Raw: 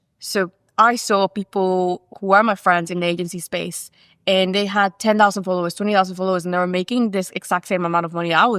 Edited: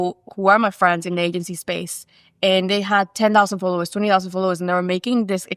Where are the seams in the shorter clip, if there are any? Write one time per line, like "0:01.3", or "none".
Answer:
none